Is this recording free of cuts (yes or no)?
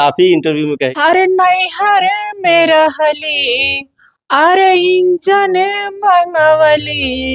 no